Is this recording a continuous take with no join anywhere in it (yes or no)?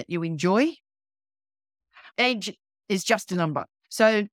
no